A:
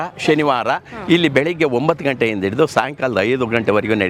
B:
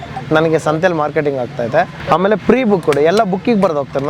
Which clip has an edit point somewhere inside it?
B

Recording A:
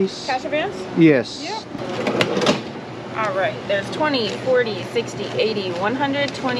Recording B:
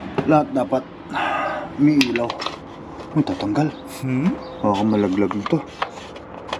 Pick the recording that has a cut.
A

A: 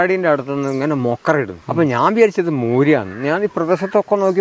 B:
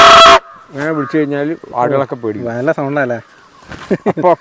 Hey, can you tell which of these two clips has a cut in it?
A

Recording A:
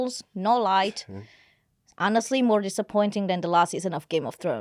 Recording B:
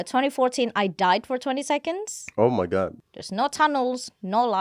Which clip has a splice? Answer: B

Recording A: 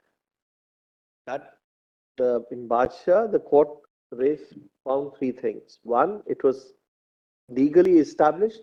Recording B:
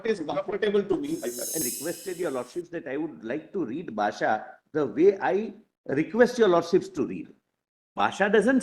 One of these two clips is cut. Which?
B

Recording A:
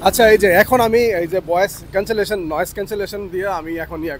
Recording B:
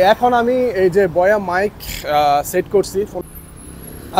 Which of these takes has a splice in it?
B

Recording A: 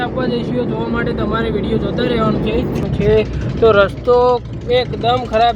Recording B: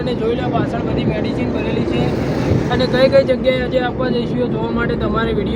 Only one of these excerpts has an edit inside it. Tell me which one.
A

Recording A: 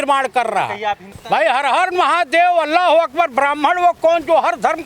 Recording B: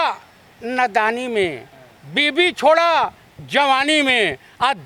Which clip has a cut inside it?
A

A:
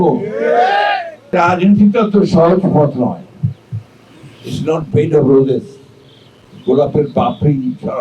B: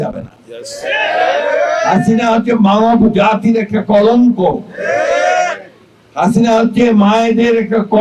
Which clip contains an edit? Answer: A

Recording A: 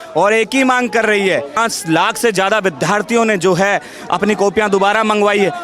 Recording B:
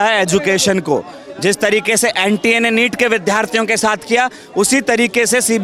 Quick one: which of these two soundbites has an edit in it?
A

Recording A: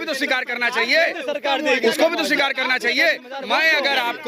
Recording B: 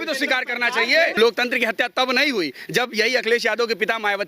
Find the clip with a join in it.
B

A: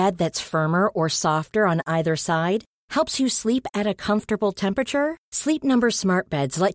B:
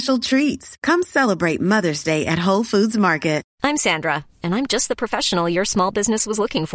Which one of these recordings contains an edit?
B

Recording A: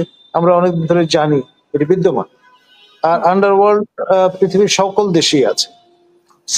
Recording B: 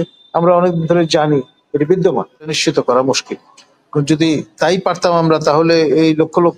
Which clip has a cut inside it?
B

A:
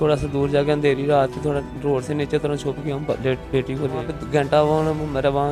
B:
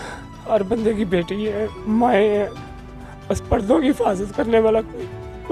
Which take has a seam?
A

